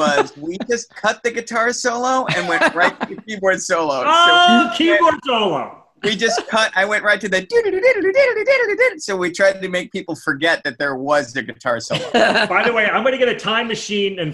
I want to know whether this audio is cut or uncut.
uncut